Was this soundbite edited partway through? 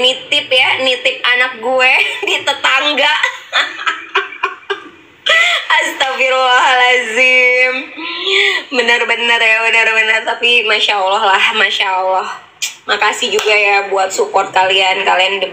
no; 0 cuts

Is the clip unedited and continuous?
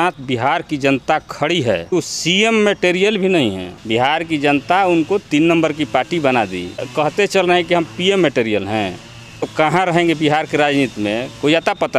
no; 4 cuts; at 1.9 s, 3.7 s, 6.9 s, 9.4 s

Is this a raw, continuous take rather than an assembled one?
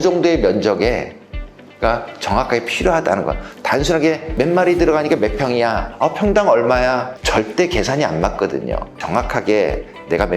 no; 4 cuts; at 4.3 s, 5.9 s, 7.2 s, 9.0 s

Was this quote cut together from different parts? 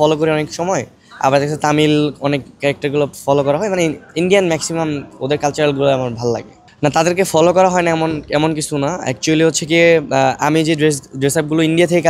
no; 0 cuts

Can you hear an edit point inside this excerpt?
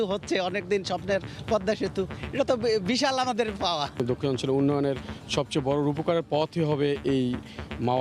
yes; 1 cut; at 4.0 s

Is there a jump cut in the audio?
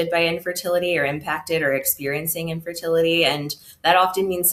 no; 0 cuts

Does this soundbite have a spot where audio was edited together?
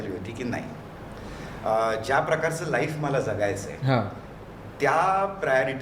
no; 0 cuts

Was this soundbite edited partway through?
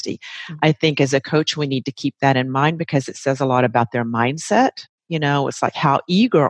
no; 0 cuts

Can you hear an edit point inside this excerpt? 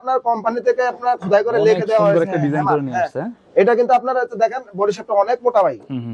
no; 0 cuts

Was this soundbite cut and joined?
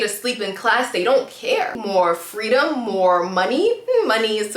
yes; 1 cut; at 1.7 s

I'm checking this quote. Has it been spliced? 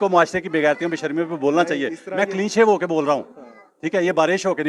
no; 0 cuts

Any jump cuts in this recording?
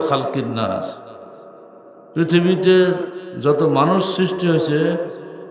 no; 0 cuts

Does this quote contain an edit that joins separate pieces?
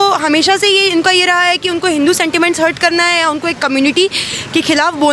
no; 0 cuts

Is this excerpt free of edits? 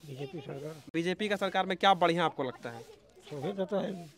yes; 0 cuts

